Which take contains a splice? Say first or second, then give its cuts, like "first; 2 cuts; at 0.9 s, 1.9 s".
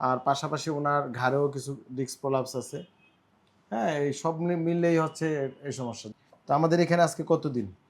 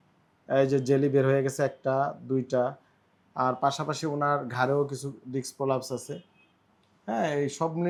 first; 1 cut; at 6.0 s